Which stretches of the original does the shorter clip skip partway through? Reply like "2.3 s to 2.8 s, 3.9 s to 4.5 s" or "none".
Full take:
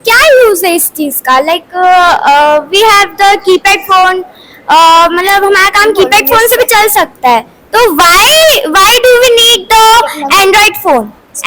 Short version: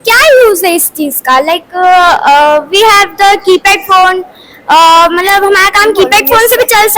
none